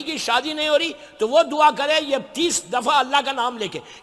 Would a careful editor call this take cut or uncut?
uncut